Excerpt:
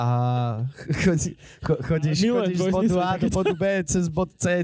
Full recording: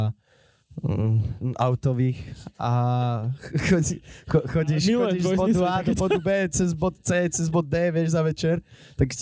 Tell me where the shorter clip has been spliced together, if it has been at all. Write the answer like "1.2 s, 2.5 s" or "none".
none